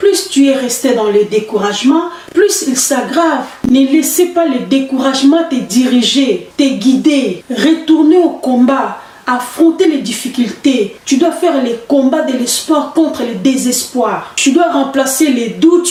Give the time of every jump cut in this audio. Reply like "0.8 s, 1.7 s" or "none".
none